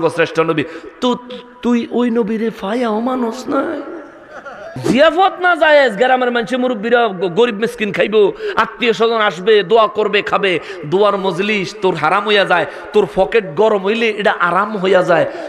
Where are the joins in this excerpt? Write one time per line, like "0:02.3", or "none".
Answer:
0:04.7